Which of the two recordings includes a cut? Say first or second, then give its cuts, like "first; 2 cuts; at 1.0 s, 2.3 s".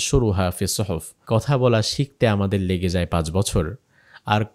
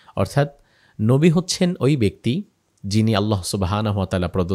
first; 1 cut; at 1.1 s